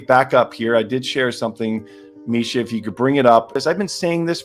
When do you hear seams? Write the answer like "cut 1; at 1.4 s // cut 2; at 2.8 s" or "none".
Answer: cut 1; at 3.6 s